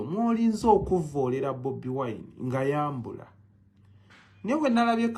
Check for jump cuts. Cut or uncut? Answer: uncut